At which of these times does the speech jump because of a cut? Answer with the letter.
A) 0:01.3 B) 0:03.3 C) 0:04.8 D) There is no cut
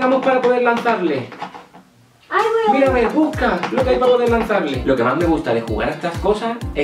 C